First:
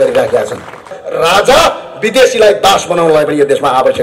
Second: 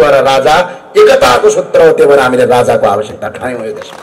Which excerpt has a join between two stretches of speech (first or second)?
first